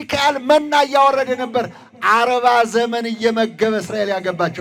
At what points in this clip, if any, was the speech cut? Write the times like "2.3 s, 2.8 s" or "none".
none